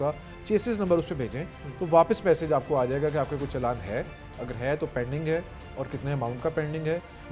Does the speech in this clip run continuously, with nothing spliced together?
yes; 0 cuts

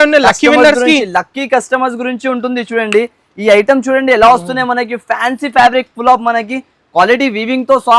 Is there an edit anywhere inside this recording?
no; 0 cuts

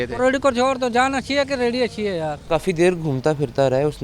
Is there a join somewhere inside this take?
yes; 1 cut; at 2.4 s

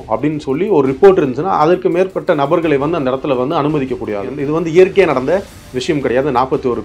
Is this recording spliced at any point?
yes; 2 cuts; at 2.2 s, 4.3 s

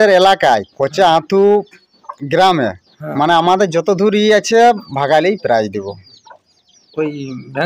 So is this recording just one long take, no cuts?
yes; 0 cuts

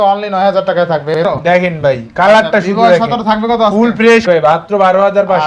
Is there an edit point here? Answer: yes; 2 cuts; at 1.2 s, 4.2 s

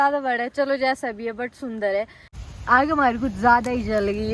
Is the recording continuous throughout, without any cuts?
no; 1 cut; at 2.2 s

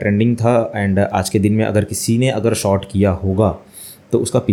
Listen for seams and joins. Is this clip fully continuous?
yes; 0 cuts

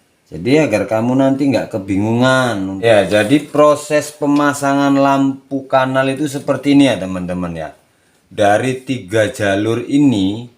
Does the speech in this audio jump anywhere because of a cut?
yes; 1 cut; at 2.8 s

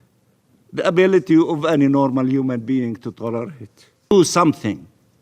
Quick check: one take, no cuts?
no; 1 cut; at 4.1 s

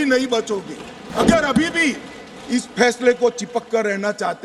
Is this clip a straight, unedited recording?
no; 1 cut; at 1.1 s

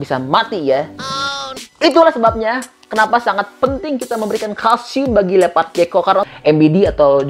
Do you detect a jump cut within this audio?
yes; 2 cuts; at 1.5 s, 6.3 s

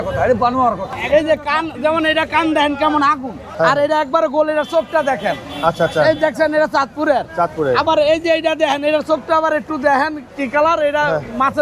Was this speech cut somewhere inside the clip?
yes; 2 cuts; at 0.9 s, 3.4 s

